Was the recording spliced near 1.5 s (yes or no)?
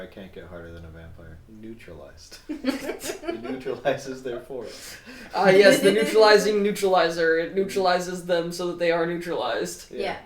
yes